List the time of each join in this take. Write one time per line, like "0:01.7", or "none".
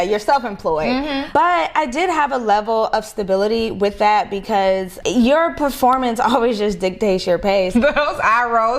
0:01.3
0:04.9
0:07.7